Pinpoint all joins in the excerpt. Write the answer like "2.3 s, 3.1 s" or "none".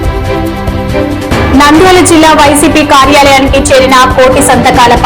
1.5 s